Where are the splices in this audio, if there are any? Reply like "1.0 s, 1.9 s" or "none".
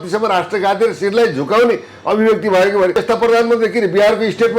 3.0 s